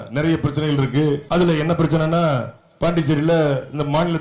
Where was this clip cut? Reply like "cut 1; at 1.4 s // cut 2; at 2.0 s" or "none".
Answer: cut 1; at 1.2 s